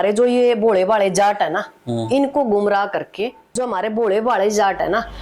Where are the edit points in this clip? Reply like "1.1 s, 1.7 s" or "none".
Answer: 3.5 s